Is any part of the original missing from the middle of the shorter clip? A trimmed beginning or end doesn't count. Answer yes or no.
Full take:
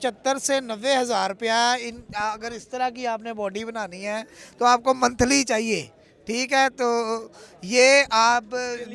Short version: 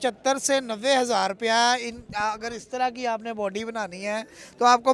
no